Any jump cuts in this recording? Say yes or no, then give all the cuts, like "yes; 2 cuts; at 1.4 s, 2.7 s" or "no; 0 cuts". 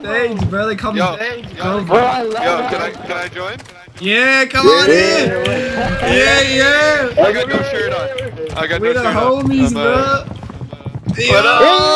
no; 0 cuts